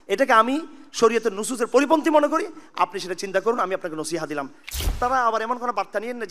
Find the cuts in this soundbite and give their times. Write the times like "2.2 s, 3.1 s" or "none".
4.9 s